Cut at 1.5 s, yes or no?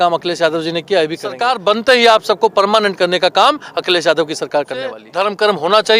yes